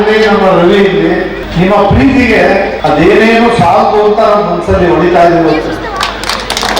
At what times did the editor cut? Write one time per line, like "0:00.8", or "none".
0:01.4
0:02.7